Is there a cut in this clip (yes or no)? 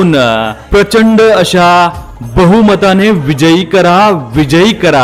no